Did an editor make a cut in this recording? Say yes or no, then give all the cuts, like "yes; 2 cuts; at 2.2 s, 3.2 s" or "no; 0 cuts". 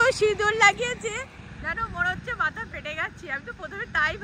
no; 0 cuts